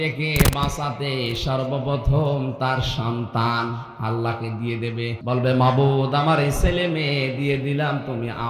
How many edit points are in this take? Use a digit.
1